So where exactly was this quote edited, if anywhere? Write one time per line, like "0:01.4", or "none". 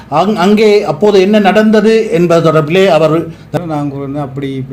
0:03.5